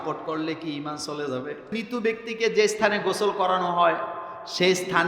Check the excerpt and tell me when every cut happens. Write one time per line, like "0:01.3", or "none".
0:01.8